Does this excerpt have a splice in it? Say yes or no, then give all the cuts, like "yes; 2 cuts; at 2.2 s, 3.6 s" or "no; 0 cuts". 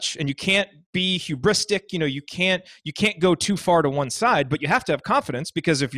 no; 0 cuts